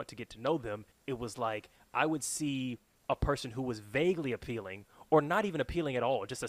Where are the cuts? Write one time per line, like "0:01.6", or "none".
0:00.9
0:02.9